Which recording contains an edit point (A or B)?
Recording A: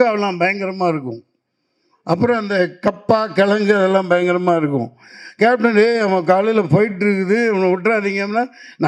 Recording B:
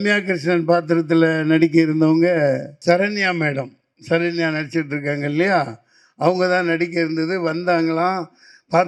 B